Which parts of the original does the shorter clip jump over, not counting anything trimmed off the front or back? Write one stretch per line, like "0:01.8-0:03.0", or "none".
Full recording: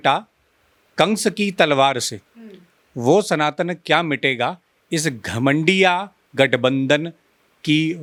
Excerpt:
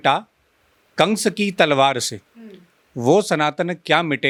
none